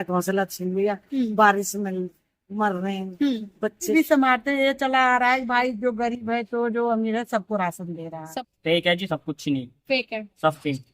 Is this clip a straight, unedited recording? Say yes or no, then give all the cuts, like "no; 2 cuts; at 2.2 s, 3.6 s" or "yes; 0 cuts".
no; 2 cuts; at 3.9 s, 8.2 s